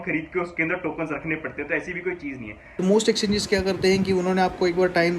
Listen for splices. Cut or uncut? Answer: cut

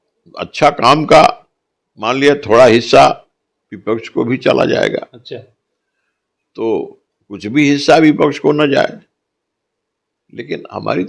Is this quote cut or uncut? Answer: uncut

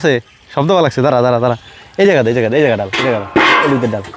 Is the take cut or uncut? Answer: uncut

